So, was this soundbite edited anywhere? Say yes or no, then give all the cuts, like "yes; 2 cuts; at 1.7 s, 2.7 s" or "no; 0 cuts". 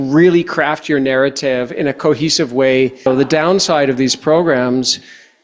yes; 1 cut; at 3.1 s